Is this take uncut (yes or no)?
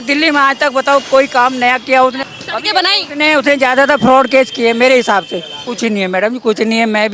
no